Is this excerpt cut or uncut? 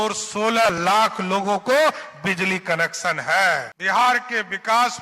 cut